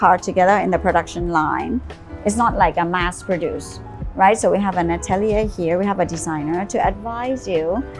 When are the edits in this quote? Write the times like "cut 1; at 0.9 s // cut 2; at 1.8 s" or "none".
cut 1; at 2.0 s